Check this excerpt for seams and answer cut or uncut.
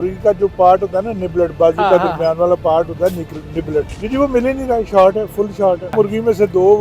cut